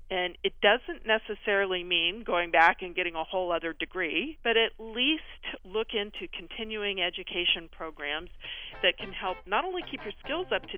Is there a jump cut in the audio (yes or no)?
yes